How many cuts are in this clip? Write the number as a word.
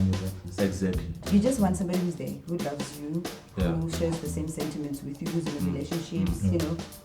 one